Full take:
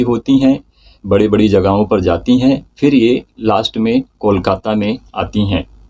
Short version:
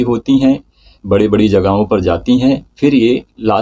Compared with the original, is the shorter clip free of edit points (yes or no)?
yes